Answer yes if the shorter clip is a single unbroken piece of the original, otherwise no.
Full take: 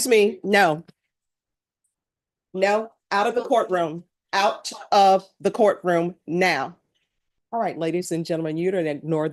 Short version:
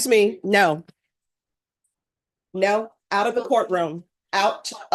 yes